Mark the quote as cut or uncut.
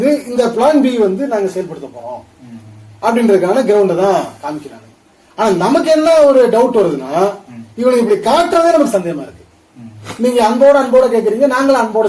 cut